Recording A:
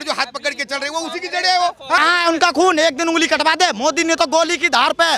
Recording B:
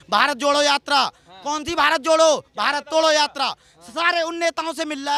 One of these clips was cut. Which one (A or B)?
A